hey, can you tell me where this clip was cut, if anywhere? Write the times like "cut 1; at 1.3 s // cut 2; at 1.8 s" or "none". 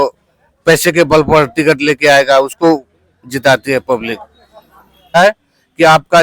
cut 1; at 5.2 s